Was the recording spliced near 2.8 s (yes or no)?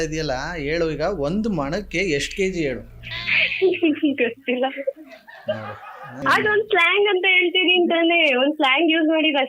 no